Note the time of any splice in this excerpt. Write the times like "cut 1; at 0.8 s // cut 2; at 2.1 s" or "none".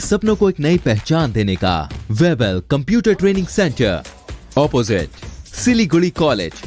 cut 1; at 1.9 s